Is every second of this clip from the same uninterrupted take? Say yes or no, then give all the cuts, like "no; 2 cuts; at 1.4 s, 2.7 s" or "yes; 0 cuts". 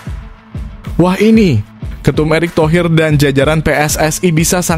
no; 1 cut; at 0.9 s